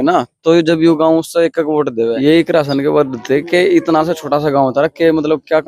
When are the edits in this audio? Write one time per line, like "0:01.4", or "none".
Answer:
0:02.2